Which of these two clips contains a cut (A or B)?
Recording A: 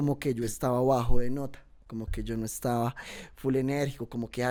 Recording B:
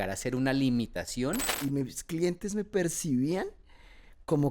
B